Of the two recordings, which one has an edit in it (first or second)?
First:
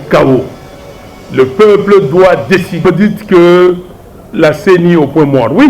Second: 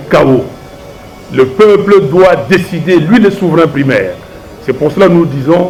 first